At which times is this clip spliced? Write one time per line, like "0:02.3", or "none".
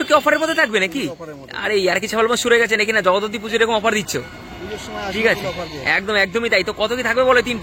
none

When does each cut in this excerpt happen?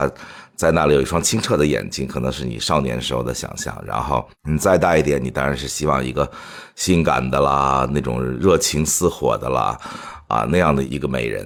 none

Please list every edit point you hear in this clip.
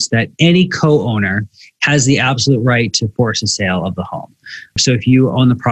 0:04.8

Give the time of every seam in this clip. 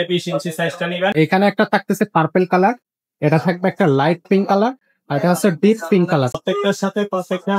0:01.1
0:06.3

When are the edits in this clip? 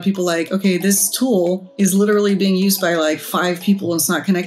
0:01.7

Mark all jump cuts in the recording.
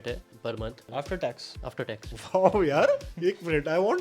0:00.9
0:02.1
0:03.1

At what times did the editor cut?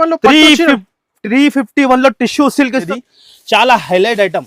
0:02.9

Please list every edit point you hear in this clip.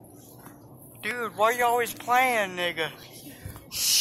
none

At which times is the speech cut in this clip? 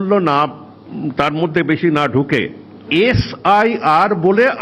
0:02.8

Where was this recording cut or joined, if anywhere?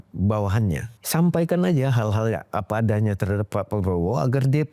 0:00.9

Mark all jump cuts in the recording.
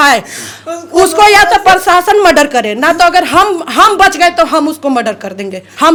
none

